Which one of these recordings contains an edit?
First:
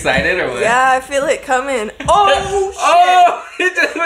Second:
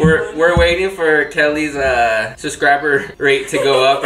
second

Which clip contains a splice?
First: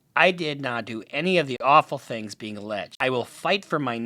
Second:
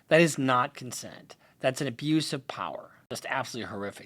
second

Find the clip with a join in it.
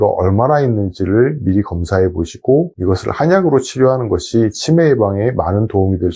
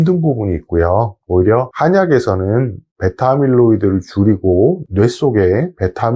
second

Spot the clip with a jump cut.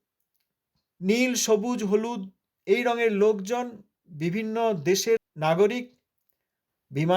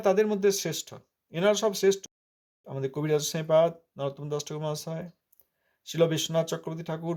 first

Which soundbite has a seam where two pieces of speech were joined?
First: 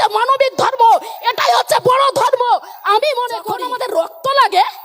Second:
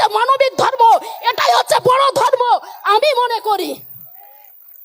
first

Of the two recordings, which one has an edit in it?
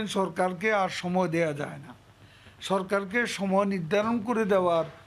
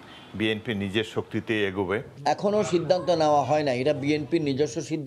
second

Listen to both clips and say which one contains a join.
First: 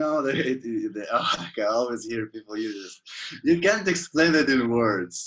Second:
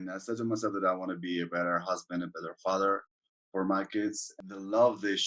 second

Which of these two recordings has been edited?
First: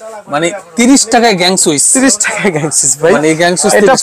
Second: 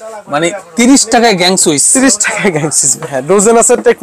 second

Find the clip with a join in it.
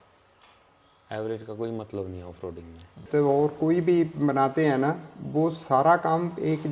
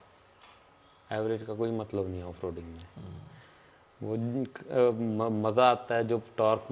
first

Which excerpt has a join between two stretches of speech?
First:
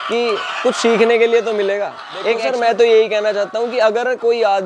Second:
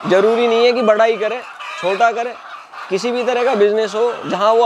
first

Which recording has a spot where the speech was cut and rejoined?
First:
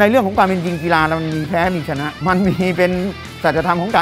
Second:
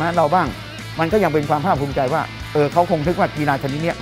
first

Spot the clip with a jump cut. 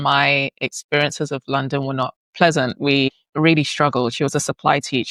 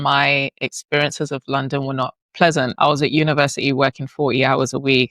second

